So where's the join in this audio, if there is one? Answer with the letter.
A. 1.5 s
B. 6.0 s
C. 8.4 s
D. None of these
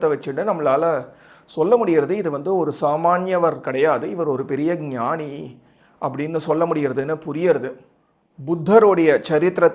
D